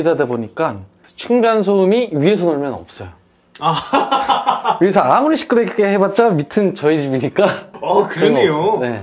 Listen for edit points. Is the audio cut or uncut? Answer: uncut